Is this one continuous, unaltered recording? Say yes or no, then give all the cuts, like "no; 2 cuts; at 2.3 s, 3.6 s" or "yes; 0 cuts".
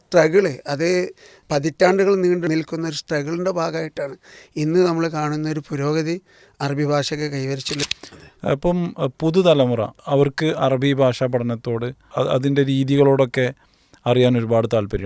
no; 3 cuts; at 1.4 s, 2.5 s, 7.9 s